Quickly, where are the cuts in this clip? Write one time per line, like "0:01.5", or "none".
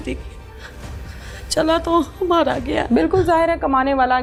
none